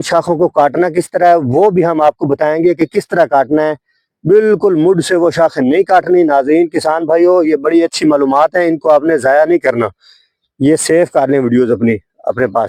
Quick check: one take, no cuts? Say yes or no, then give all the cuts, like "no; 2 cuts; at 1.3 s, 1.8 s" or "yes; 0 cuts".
yes; 0 cuts